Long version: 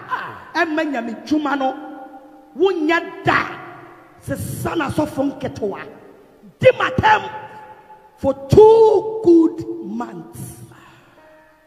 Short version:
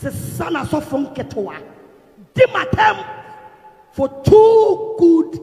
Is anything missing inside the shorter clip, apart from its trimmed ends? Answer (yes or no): no